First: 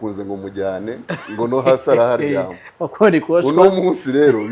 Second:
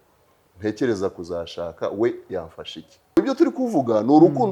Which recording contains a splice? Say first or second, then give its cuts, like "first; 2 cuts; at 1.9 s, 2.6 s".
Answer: second; 1 cut; at 3.2 s